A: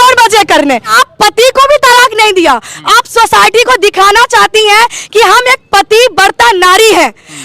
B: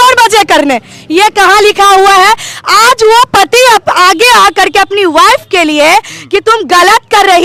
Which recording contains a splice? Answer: A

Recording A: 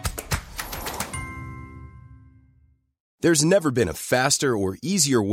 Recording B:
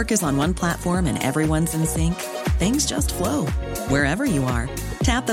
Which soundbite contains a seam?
A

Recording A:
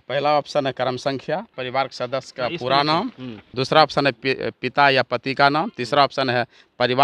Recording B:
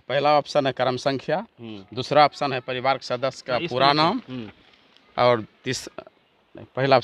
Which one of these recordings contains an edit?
A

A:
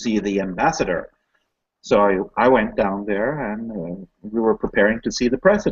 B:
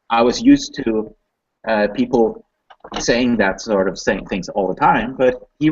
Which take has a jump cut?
B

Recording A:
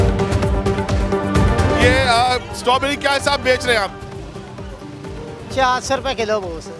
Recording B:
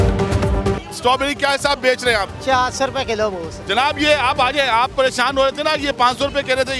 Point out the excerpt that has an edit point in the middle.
B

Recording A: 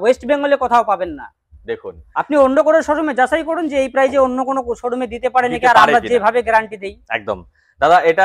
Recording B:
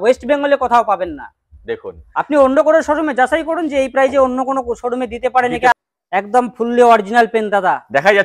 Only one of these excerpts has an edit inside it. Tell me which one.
B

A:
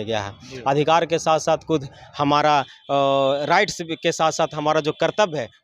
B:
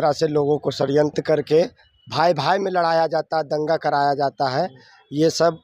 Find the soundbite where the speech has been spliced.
B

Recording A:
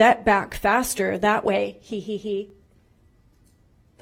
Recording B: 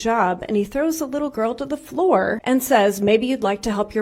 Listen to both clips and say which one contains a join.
B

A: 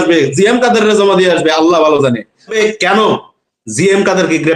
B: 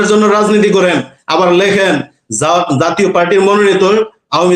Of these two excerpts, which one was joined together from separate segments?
A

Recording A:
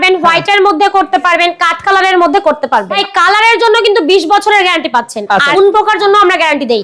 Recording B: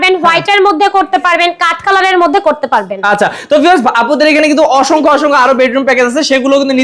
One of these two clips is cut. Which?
A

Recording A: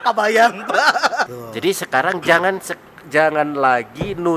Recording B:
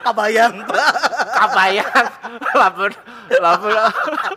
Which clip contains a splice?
A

